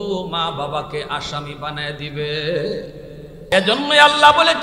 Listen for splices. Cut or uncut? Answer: cut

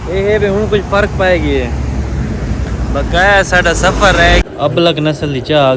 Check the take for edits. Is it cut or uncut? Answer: cut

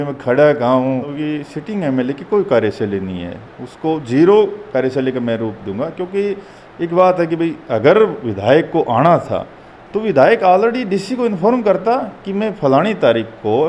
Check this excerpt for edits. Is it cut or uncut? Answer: cut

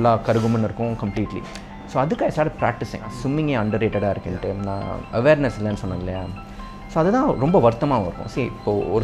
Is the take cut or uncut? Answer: cut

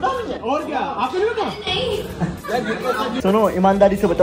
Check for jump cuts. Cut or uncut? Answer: uncut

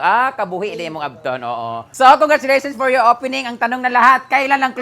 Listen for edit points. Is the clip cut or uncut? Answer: cut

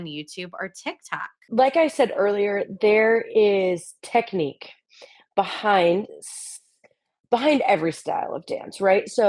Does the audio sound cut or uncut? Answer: uncut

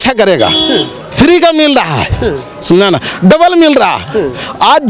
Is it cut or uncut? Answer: uncut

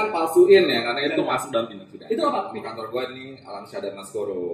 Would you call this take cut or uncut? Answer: cut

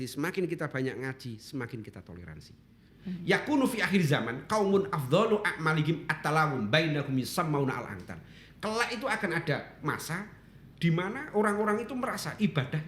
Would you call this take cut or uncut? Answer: cut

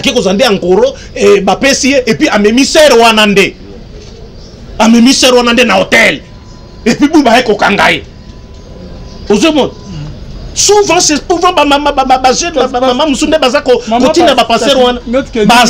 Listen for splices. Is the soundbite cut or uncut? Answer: uncut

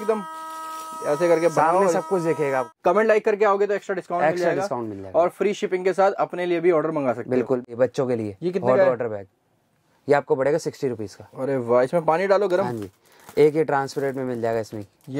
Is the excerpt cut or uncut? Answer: cut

